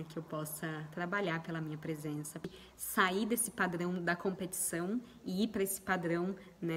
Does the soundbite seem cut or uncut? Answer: cut